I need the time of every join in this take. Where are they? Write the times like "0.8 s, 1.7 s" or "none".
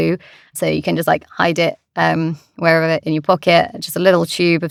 none